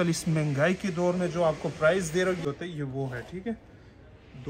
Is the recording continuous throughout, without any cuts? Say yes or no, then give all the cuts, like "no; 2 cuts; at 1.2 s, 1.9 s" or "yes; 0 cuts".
no; 1 cut; at 2.4 s